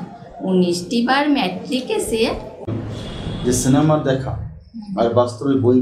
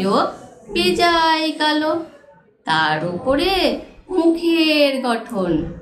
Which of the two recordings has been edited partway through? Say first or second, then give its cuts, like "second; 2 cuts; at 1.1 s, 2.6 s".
first; 1 cut; at 2.7 s